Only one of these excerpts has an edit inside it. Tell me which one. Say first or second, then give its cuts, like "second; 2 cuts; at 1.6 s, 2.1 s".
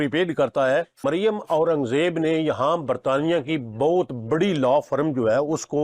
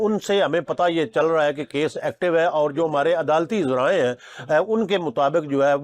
first; 1 cut; at 1.0 s